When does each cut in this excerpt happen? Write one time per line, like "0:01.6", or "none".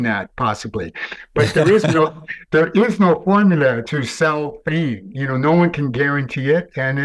0:03.8